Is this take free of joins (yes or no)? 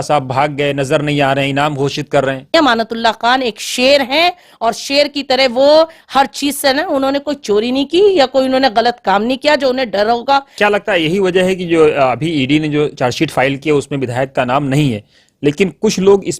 no